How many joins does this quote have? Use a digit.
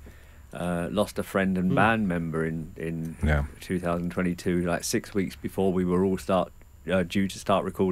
0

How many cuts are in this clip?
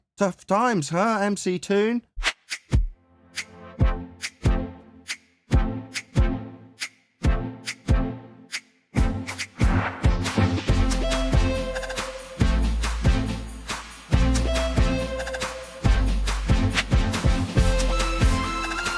0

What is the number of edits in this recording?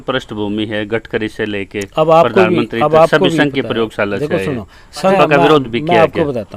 1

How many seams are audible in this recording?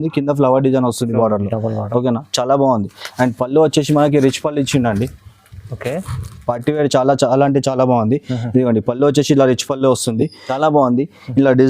1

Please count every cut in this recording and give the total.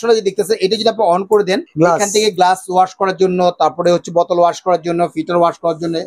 1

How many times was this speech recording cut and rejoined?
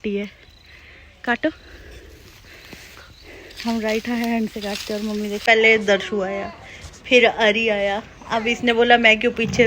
1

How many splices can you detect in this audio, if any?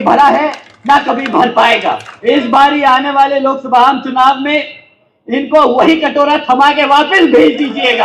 1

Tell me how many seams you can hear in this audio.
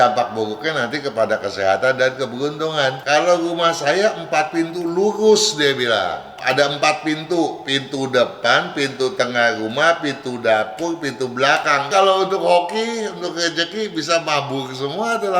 3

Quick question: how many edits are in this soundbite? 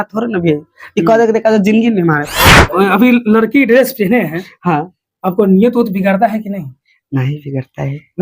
1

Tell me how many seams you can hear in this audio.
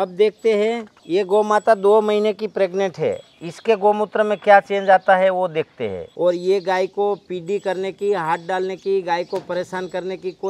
2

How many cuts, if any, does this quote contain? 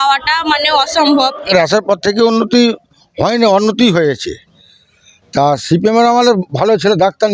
1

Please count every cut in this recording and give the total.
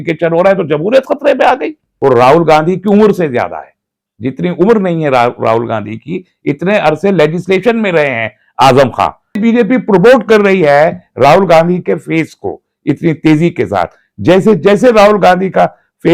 2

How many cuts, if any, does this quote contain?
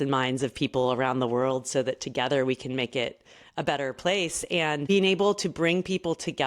1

